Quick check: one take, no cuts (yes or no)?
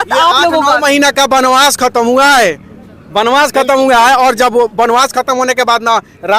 yes